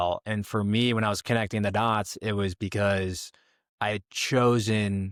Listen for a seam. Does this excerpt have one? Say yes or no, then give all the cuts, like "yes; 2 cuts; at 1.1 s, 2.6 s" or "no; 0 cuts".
no; 0 cuts